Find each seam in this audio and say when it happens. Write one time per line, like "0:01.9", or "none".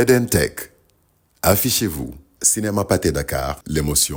none